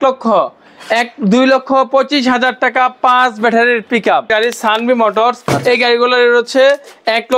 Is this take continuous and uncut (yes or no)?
no